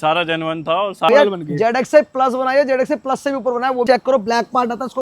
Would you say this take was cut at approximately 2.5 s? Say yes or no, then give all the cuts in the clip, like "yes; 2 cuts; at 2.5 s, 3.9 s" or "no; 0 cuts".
no; 2 cuts; at 1.1 s, 3.9 s